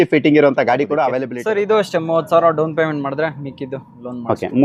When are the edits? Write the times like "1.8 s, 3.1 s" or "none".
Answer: 1.3 s